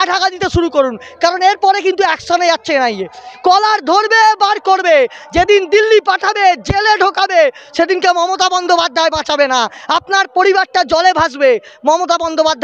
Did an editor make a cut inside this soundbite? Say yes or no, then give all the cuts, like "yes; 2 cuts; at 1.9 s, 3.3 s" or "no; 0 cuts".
no; 0 cuts